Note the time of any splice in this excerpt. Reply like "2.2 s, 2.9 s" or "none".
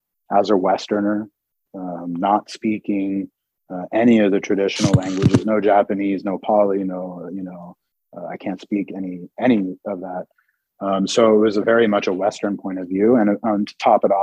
none